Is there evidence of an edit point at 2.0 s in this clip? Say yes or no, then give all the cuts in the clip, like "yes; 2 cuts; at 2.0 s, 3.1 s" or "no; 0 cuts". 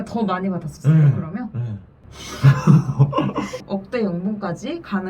no; 1 cut; at 3.6 s